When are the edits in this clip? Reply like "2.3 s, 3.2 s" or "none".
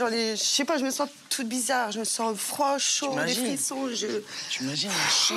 none